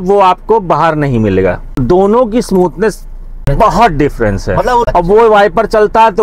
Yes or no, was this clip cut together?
yes